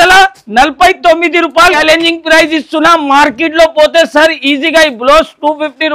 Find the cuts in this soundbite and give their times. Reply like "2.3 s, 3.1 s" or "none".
1.8 s

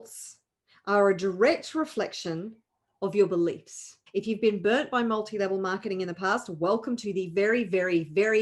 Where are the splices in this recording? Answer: 3.9 s

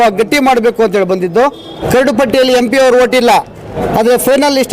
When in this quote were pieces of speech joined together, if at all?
1.8 s, 3.7 s

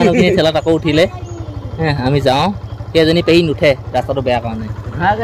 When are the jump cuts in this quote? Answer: none

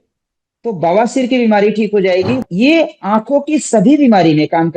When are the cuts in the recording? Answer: 2.4 s

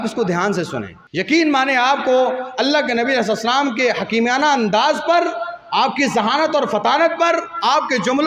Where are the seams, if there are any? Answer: 1.0 s

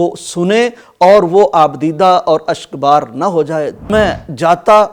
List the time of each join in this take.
3.9 s

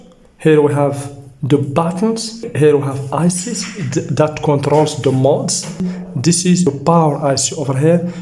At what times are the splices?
2.5 s, 5.9 s

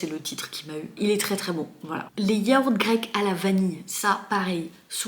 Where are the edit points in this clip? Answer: none

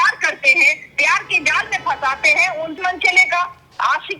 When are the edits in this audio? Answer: 2.8 s

